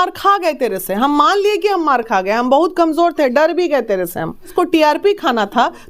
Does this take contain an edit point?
yes; 1 cut; at 4.5 s

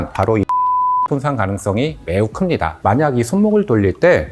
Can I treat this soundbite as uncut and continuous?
no; 1 cut; at 2.8 s

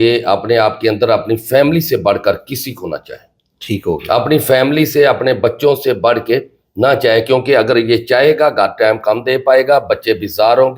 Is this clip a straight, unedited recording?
yes; 0 cuts

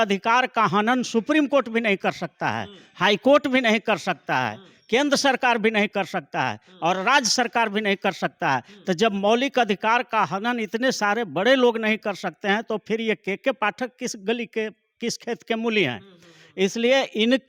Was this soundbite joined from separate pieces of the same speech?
no; 0 cuts

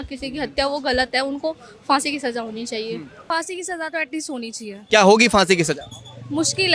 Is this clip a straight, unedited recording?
no; 2 cuts; at 3.3 s, 4.8 s

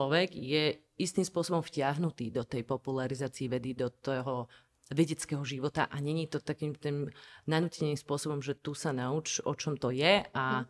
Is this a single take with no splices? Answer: yes; 0 cuts

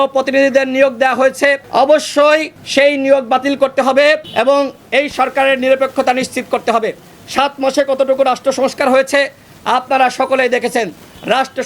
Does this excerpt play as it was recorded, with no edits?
no; 3 cuts; at 1.6 s, 2.6 s, 4.3 s

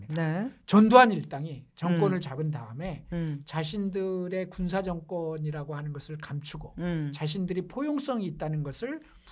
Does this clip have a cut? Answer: no; 0 cuts

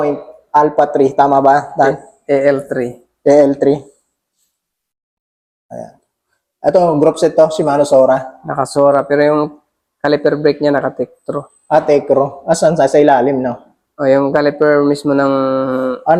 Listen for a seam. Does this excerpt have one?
no; 0 cuts

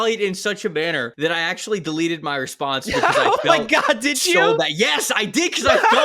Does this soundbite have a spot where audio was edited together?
yes; 1 cut; at 1.1 s

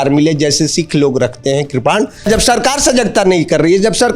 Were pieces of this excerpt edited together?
yes; 1 cut; at 2.3 s

